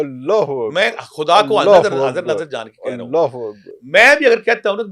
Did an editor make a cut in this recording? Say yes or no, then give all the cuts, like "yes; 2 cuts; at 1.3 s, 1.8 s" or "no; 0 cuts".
no; 0 cuts